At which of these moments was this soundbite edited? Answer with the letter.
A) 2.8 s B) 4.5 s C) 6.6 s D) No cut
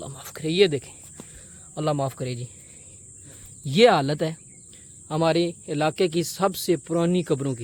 D